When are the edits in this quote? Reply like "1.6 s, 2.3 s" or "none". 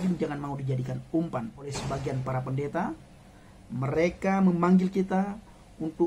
1.7 s